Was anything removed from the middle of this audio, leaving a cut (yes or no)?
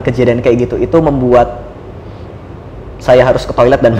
no